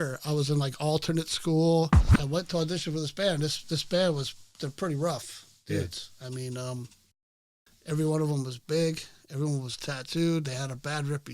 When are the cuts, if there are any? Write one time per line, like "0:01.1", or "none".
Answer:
0:02.1